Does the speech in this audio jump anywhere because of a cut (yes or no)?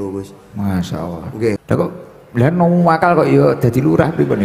yes